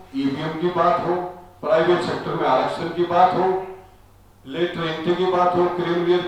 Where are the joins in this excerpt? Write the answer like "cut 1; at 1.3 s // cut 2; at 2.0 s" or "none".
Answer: none